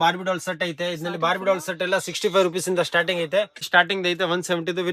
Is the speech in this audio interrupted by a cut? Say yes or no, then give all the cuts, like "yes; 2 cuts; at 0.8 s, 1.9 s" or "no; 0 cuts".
yes; 1 cut; at 3.6 s